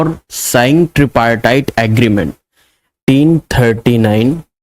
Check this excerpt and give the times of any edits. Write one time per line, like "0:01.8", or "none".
0:02.9